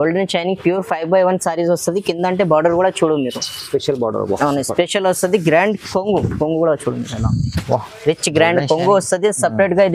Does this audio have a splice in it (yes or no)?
no